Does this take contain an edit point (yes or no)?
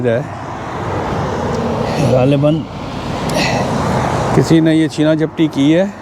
no